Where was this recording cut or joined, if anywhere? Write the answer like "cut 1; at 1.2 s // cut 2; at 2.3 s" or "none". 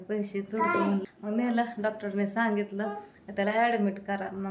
cut 1; at 1.1 s